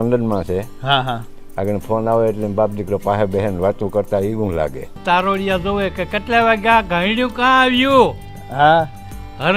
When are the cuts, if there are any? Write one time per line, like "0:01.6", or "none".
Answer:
0:04.9